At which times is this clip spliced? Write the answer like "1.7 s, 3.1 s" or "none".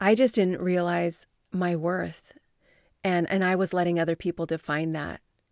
none